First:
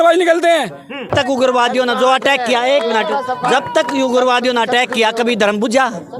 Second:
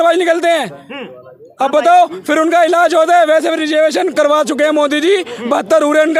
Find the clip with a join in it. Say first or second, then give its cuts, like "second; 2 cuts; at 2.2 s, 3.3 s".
first; 1 cut; at 1.1 s